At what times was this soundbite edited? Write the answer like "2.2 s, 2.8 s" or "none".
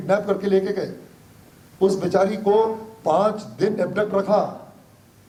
none